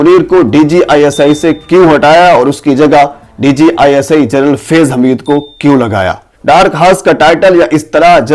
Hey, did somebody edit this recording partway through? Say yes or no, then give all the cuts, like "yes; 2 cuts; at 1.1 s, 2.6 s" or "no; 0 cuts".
yes; 1 cut; at 6.3 s